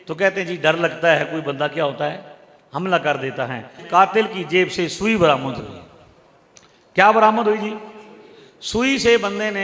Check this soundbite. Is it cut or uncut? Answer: cut